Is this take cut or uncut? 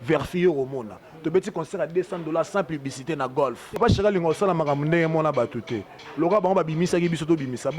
cut